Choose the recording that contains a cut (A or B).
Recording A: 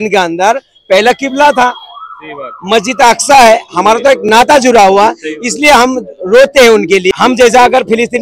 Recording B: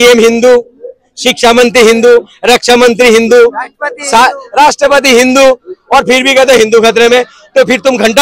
A